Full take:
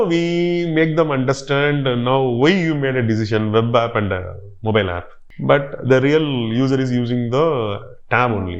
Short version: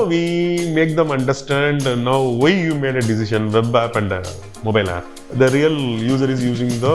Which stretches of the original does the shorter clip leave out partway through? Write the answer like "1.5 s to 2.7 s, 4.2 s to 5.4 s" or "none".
5.2 s to 5.7 s